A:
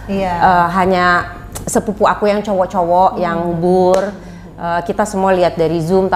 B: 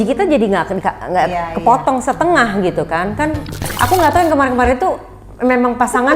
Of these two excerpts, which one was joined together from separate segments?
B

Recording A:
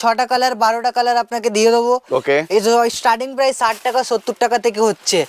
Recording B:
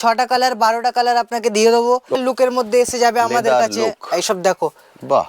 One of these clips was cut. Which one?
B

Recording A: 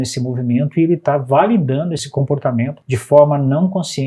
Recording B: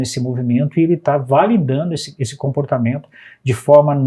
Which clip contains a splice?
A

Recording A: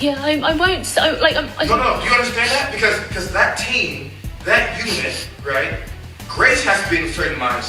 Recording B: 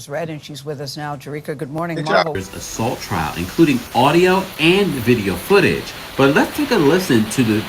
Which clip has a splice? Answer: B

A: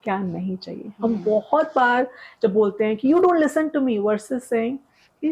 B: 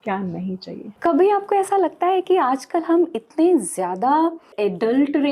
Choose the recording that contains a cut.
B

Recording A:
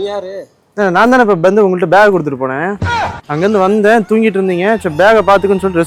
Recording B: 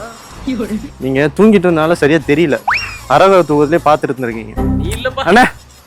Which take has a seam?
B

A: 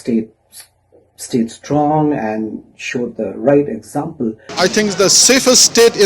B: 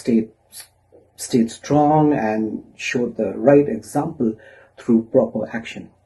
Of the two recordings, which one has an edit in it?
A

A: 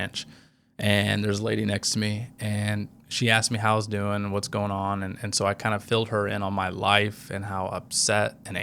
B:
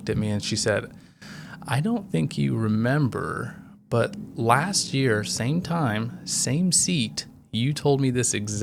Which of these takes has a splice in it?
A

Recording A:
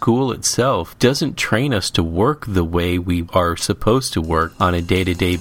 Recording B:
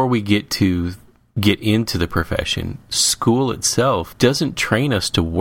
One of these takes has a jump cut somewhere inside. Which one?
A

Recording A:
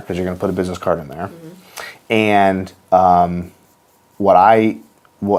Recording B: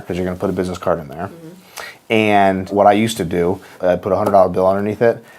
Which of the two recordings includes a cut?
B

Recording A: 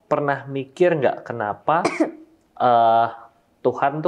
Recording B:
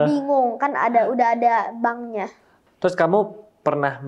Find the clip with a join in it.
B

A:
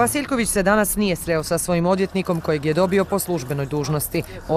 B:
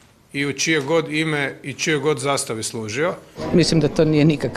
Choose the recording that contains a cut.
B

